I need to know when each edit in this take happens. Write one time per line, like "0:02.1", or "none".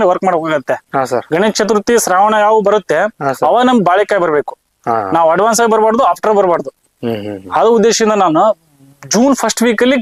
none